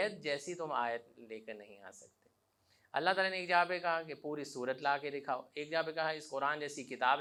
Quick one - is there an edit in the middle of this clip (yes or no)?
no